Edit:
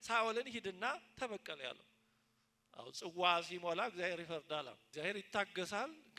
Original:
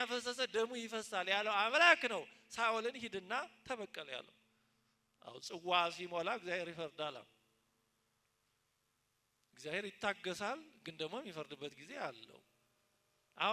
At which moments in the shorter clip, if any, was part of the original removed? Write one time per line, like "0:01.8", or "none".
0:04.8